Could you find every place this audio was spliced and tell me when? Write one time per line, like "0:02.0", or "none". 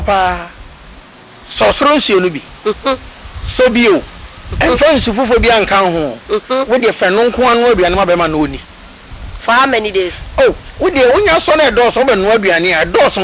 none